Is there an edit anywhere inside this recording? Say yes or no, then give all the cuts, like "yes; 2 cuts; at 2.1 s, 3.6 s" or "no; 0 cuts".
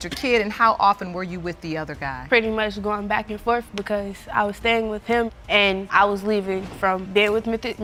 no; 0 cuts